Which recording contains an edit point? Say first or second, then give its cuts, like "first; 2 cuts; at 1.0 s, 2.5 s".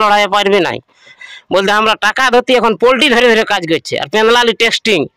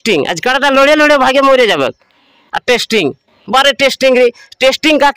first; 1 cut; at 1.2 s